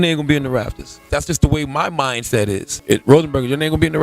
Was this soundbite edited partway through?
yes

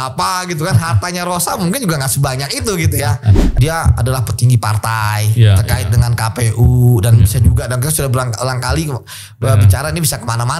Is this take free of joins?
no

